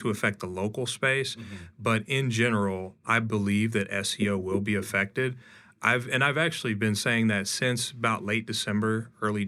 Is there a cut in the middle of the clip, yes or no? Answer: no